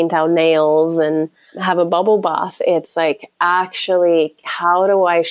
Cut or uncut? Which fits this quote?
cut